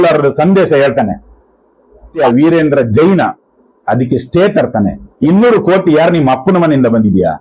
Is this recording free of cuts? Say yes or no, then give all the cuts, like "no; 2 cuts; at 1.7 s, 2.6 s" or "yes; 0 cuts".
no; 2 cuts; at 2.1 s, 5.0 s